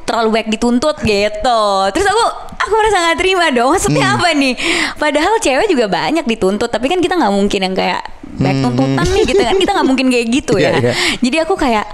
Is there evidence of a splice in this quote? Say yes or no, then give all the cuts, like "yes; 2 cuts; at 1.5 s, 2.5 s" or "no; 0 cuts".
no; 0 cuts